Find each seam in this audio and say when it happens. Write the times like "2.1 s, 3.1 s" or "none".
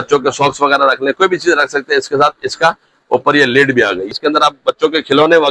4.1 s